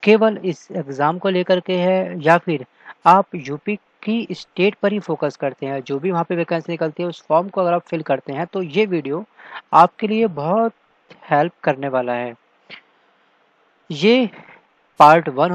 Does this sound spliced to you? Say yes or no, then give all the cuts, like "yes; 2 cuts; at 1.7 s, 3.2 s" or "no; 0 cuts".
no; 0 cuts